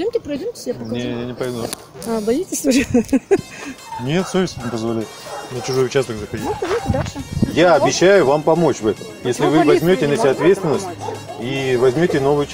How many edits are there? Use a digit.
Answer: 1